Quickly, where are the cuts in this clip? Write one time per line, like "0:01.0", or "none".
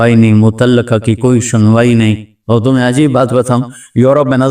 0:02.3